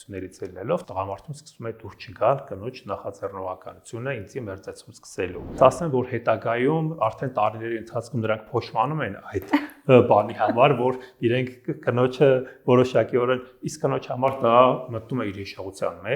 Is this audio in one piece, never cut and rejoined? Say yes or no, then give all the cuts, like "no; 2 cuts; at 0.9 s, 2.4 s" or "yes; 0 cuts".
no; 1 cut; at 5.6 s